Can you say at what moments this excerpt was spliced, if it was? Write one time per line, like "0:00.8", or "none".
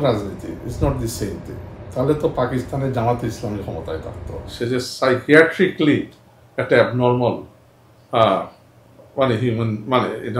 0:04.5